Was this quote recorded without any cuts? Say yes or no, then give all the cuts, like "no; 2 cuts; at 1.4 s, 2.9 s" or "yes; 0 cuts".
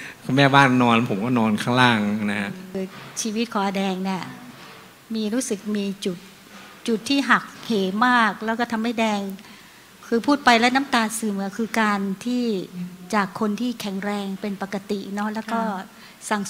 no; 1 cut; at 2.8 s